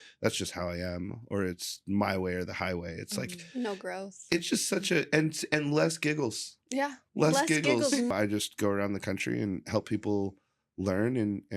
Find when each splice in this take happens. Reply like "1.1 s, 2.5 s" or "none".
8.1 s